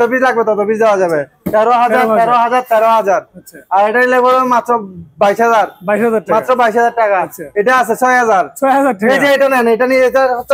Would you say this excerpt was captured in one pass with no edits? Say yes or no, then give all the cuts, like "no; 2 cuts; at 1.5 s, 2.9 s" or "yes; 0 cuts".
yes; 0 cuts